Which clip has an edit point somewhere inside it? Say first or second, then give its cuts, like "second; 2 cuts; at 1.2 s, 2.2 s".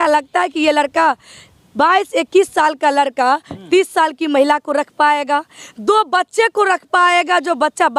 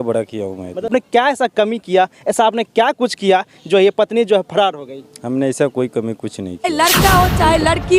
second; 2 cuts; at 1.2 s, 6.6 s